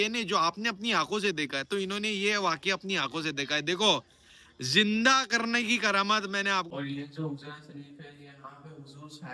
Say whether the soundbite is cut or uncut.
cut